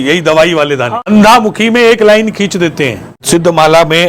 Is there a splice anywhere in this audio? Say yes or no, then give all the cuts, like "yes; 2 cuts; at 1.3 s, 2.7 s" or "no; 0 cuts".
yes; 2 cuts; at 1.0 s, 3.1 s